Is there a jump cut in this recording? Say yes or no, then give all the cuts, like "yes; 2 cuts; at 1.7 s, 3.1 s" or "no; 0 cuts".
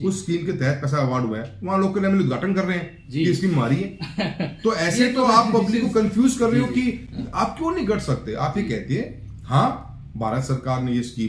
no; 0 cuts